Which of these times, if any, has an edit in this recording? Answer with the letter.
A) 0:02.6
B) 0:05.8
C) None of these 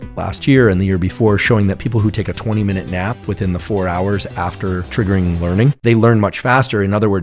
B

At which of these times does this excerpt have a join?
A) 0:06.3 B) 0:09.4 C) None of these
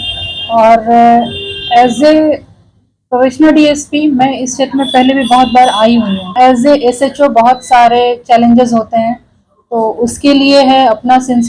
A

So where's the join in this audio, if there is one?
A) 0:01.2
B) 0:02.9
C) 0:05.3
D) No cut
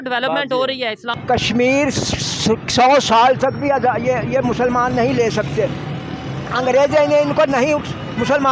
A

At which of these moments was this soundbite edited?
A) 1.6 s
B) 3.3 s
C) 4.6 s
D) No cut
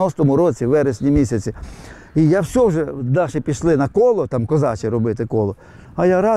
D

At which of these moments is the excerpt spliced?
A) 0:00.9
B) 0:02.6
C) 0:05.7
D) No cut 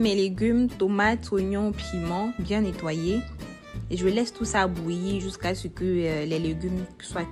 D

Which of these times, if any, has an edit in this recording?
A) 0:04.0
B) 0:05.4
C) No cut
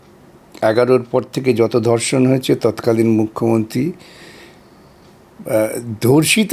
C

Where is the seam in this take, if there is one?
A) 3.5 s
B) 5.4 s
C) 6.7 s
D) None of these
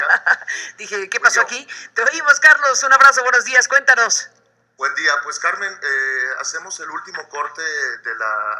C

